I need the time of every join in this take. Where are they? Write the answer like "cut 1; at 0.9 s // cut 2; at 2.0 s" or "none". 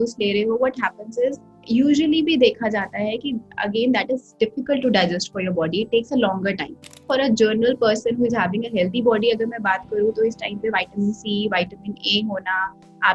cut 1; at 6.7 s